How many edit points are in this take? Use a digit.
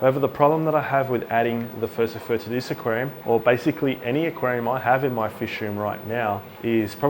0